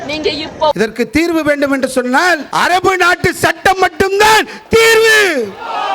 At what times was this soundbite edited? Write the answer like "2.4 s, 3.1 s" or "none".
0.7 s, 2.5 s